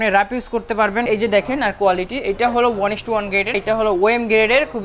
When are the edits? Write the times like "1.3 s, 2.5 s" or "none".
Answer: 1.1 s, 3.6 s